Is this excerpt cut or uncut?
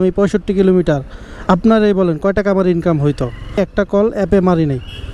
uncut